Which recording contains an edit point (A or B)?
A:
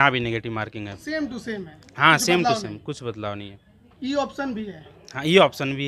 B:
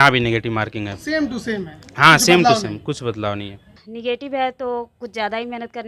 B